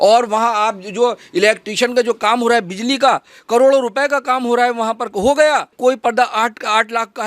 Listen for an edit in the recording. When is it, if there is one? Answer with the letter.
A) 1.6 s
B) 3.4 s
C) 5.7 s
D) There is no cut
C